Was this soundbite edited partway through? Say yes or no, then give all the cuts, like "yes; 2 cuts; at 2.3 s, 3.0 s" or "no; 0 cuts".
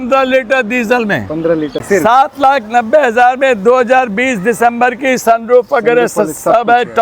yes; 1 cut; at 1.8 s